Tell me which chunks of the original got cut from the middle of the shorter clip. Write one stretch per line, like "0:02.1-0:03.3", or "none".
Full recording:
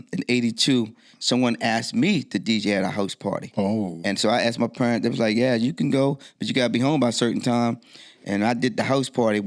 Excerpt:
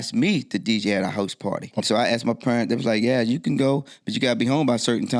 0:03.6-0:04.1